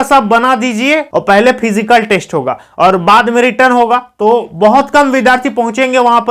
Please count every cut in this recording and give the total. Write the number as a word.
one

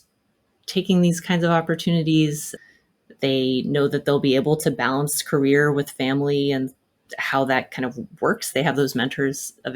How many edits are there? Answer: one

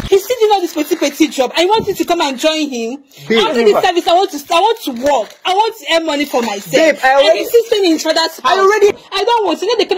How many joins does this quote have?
one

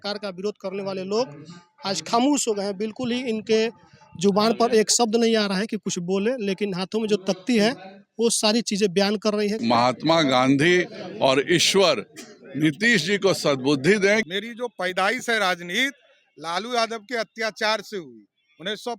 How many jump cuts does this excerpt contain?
two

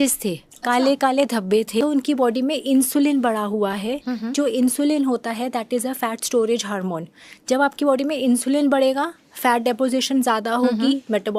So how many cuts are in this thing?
one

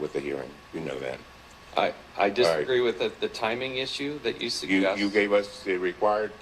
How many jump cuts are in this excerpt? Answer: one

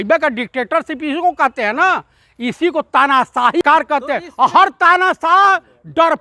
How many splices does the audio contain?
one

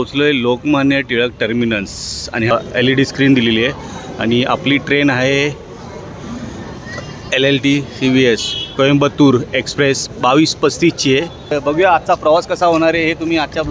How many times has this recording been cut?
two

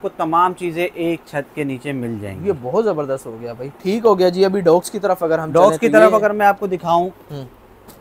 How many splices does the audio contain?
zero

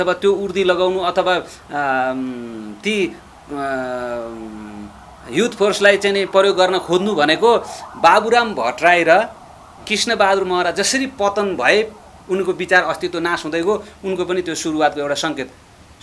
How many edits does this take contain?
zero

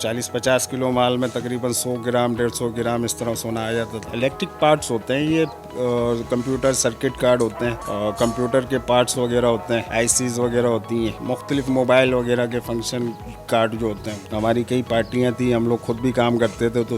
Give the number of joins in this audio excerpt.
two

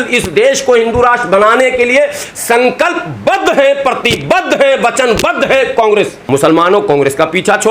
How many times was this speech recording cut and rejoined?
one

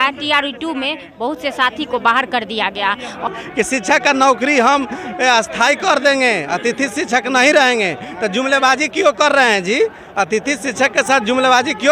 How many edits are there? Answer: one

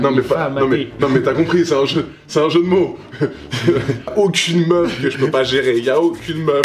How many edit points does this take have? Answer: one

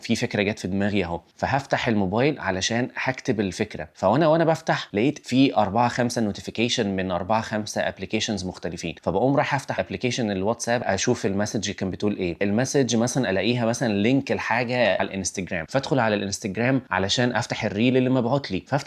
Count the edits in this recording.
five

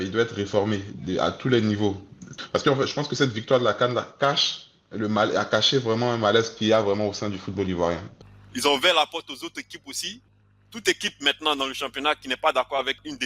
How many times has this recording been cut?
two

